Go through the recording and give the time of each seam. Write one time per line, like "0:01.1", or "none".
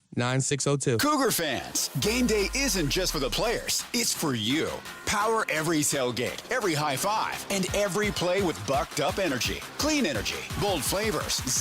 0:01.0